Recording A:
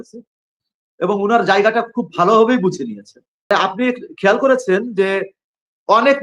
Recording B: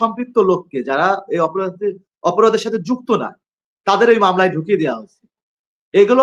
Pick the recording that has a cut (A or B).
A